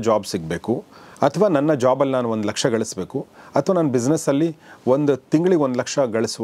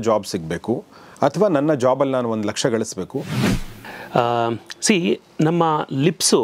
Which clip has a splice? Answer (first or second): second